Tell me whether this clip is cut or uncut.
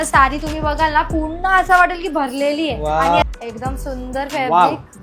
cut